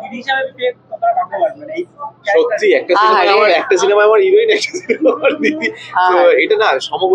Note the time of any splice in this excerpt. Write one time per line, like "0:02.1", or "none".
none